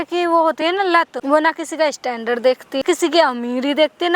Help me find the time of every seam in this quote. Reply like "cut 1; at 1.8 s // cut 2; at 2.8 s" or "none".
cut 1; at 1.2 s // cut 2; at 2.8 s